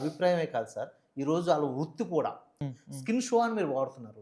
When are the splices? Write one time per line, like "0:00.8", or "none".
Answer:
0:02.5